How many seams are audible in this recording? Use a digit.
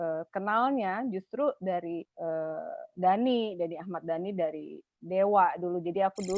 1